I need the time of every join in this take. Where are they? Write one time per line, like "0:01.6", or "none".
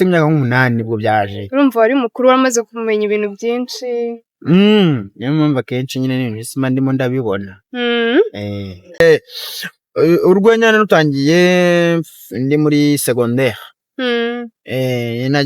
0:09.0